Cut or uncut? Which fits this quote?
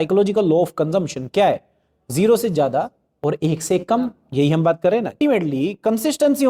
cut